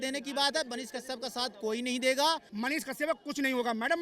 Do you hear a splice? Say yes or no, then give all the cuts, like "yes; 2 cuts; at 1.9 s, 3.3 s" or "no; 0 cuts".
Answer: yes; 1 cut; at 2.5 s